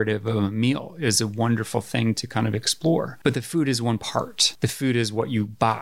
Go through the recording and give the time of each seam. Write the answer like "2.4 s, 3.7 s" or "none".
3.1 s, 4.4 s